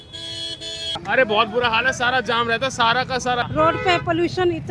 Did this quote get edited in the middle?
yes; 2 cuts; at 0.9 s, 3.5 s

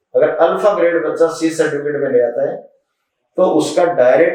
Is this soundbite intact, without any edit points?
yes; 0 cuts

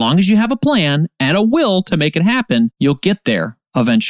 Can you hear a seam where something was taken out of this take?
yes; 1 cut; at 2.7 s

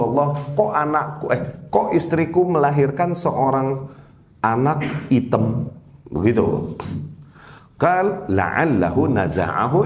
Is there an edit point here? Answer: no; 0 cuts

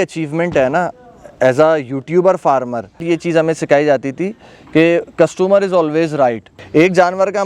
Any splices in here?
yes; 2 cuts; at 3.0 s, 6.5 s

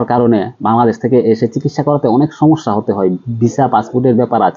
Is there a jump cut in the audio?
no; 0 cuts

